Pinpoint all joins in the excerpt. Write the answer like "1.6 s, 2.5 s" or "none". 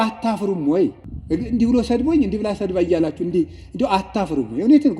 1.1 s